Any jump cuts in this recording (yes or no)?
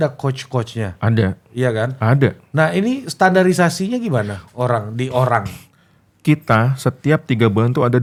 no